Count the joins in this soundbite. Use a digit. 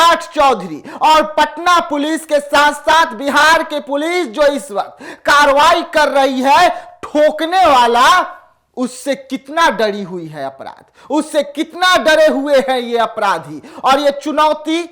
0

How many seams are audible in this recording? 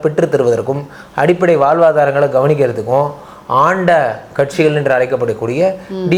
0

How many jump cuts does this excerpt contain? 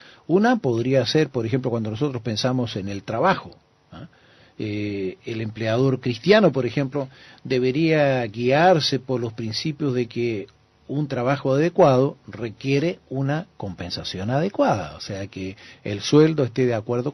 1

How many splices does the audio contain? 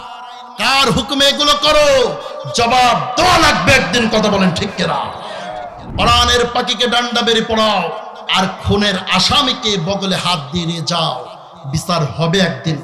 1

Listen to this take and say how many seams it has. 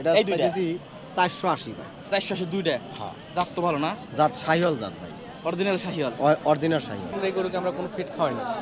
1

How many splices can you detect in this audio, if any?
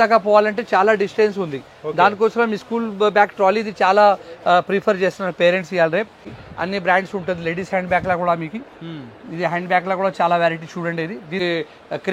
2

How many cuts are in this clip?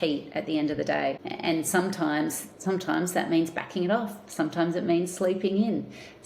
1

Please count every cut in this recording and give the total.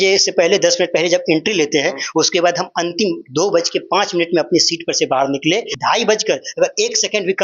1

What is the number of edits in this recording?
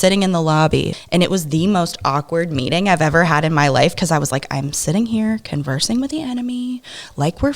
1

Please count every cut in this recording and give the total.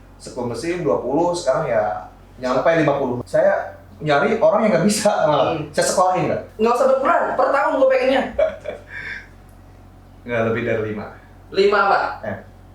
2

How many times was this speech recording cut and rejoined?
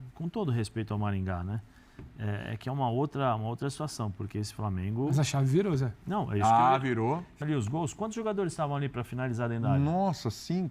1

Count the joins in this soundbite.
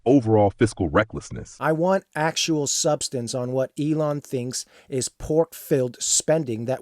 1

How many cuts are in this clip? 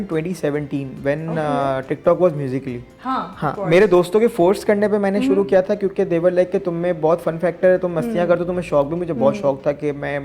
0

